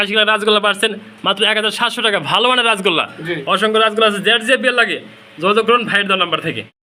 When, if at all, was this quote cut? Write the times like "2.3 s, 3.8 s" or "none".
none